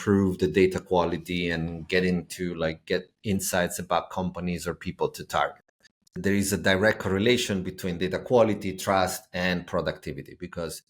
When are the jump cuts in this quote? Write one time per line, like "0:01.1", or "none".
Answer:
0:06.2